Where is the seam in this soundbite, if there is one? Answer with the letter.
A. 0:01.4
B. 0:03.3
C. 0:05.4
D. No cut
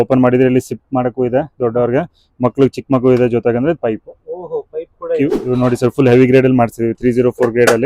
C